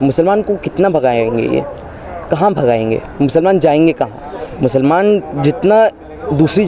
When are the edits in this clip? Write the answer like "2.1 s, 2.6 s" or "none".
none